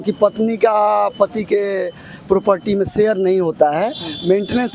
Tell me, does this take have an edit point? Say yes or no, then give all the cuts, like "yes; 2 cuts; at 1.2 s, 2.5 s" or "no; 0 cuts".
no; 0 cuts